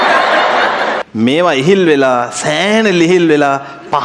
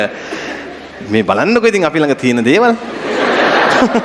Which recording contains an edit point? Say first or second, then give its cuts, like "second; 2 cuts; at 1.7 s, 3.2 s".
first; 1 cut; at 1.0 s